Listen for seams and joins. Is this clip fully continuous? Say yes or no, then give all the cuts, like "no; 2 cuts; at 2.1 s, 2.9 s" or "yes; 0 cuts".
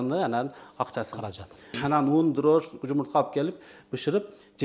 no; 1 cut; at 1.8 s